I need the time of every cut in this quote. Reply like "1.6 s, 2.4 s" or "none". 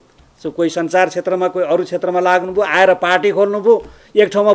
none